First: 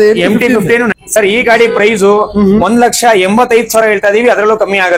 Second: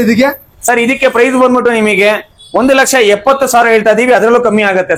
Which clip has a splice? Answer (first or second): first